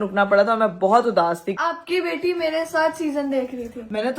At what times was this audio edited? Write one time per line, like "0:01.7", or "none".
0:01.5